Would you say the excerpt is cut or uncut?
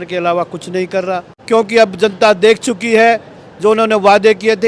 cut